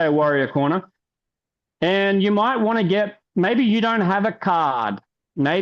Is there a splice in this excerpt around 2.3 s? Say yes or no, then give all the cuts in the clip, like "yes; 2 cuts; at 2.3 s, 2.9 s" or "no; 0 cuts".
no; 1 cut; at 4.7 s